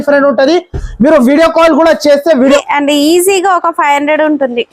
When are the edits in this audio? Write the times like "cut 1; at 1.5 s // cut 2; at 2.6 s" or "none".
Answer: cut 1; at 2.6 s

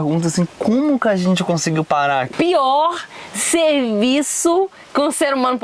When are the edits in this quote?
cut 1; at 2.3 s

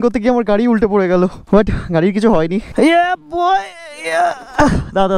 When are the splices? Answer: none

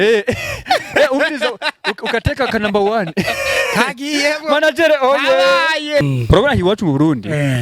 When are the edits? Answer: cut 1; at 6.0 s

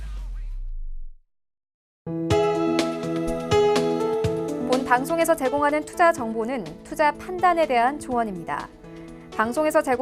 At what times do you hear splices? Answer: cut 1; at 1.8 s

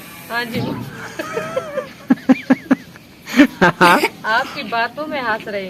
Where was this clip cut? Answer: none

